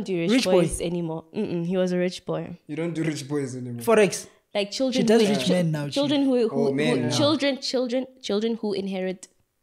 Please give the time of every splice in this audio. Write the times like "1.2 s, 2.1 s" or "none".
none